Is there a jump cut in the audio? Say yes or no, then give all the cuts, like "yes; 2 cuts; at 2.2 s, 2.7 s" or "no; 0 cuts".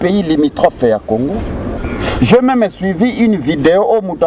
yes; 1 cut; at 1.8 s